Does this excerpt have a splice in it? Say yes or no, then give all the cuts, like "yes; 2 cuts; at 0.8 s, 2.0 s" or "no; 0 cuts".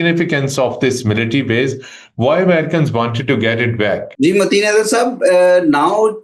no; 0 cuts